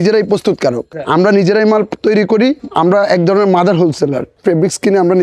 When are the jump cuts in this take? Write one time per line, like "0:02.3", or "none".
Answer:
0:00.9
0:02.6
0:04.3